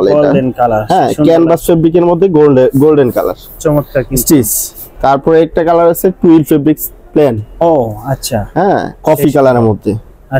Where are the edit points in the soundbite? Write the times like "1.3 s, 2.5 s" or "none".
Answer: none